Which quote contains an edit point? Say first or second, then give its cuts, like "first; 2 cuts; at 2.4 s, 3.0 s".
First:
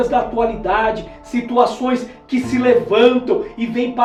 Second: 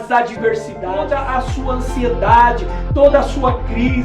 second; 1 cut; at 1.0 s